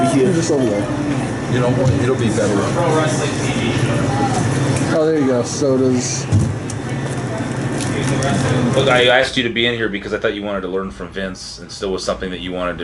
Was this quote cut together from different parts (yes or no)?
yes